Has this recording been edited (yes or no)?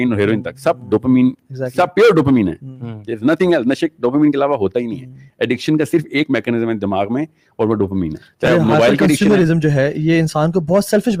no